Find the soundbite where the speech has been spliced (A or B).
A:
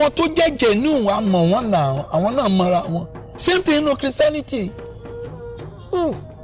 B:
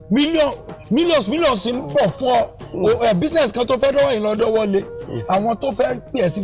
A